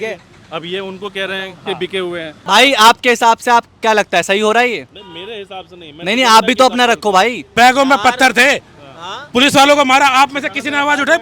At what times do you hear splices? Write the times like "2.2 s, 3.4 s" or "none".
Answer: 2.4 s, 7.5 s

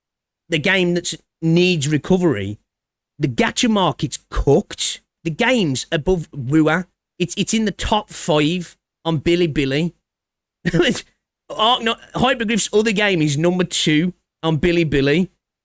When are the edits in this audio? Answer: 5.1 s, 7.0 s

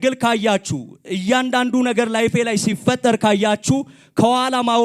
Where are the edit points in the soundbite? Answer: none

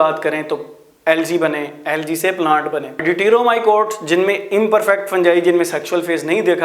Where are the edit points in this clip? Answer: 3.0 s

